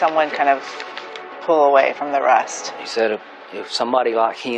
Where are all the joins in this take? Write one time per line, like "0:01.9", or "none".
0:02.6